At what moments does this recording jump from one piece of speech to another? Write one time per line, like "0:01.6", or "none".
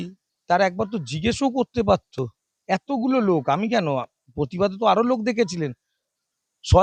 none